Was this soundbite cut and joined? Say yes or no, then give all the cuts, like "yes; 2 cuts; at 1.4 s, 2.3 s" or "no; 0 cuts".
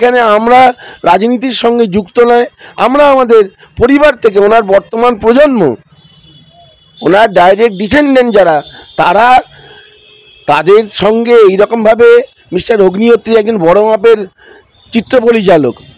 no; 0 cuts